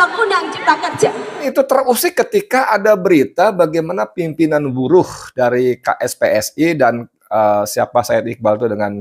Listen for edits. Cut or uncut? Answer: cut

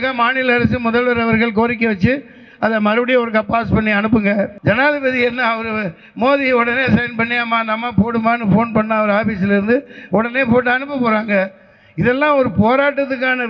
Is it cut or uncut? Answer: cut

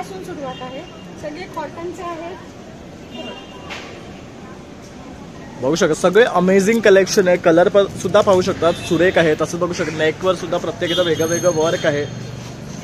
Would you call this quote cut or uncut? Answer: uncut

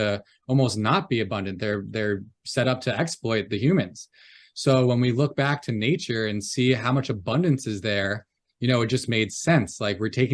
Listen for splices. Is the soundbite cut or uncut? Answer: uncut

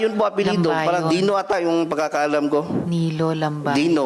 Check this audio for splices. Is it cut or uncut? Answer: uncut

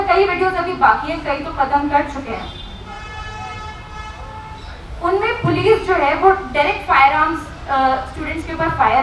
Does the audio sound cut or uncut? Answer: uncut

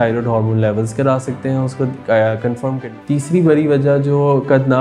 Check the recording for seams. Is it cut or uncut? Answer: cut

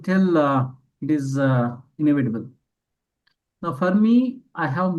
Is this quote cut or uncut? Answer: uncut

